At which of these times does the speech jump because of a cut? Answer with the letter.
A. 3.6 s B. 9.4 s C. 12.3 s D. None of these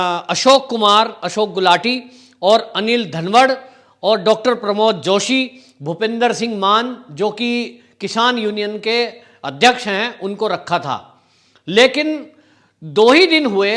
D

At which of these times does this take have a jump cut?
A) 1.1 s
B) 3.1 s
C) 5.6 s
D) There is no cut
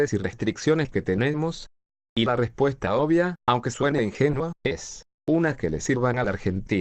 C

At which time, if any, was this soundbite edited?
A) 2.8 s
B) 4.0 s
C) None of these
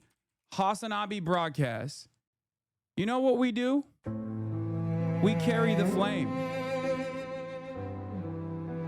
B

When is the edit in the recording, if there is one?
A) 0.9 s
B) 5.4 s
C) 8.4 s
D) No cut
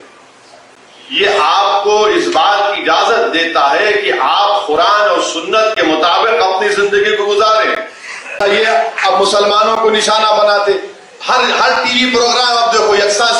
C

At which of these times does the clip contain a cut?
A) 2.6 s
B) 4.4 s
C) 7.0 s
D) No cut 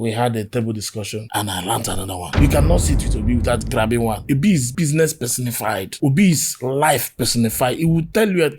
B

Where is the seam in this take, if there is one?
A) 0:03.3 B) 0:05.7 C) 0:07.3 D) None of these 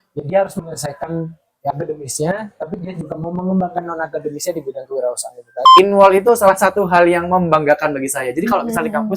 B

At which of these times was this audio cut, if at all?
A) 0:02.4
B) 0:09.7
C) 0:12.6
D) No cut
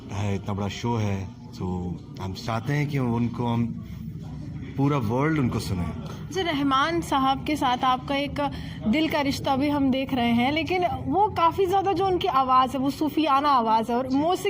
A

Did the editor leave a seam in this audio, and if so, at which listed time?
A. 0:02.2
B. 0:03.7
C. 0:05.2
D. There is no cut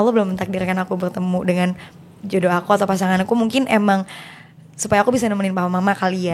D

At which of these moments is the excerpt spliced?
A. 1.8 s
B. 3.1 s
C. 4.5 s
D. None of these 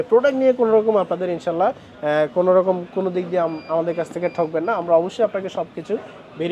D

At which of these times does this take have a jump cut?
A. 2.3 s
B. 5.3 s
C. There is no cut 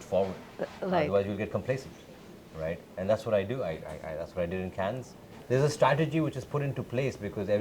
B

